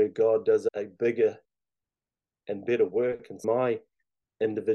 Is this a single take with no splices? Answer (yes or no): no